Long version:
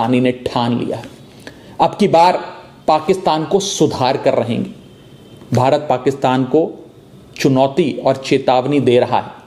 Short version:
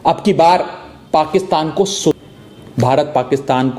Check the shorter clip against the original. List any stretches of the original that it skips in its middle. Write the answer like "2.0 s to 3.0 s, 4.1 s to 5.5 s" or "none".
3.9 s to 4.9 s